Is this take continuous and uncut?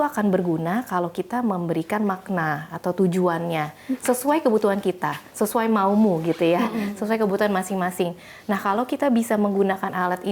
yes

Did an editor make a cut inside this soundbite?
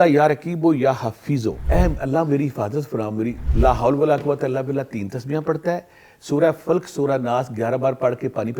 yes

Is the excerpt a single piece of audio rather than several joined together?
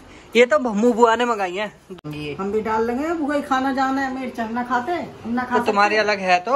no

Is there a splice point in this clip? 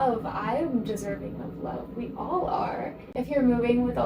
yes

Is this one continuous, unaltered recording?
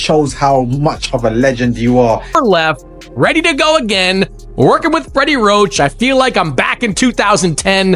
no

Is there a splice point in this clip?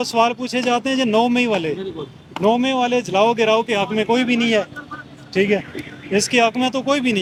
no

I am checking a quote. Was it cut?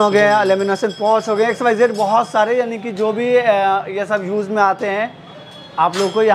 no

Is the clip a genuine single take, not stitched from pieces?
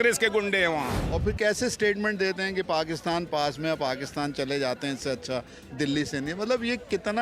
no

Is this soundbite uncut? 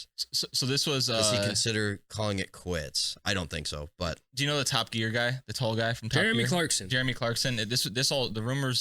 yes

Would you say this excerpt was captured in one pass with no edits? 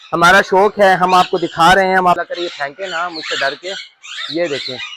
no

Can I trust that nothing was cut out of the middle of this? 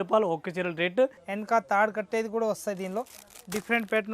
no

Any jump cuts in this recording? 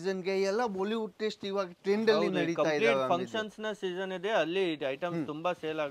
no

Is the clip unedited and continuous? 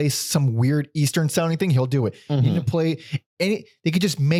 yes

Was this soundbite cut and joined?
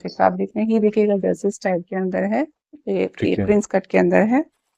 yes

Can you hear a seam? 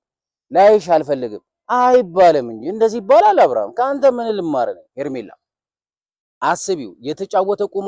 yes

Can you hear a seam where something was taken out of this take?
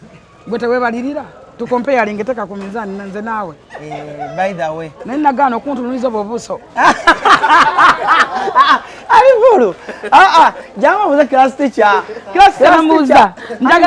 no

